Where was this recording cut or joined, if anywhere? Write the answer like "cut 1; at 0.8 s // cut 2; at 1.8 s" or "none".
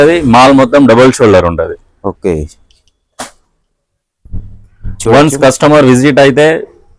none